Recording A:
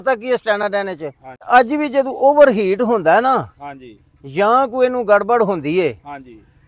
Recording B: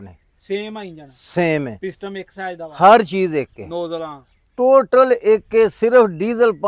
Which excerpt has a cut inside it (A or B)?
A